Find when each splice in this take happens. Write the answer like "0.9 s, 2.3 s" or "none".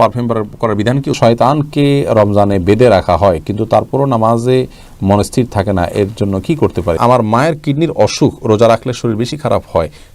1.2 s, 7.0 s